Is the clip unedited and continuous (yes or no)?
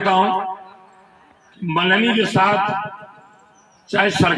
yes